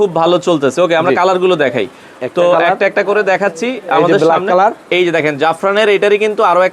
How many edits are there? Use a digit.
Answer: 0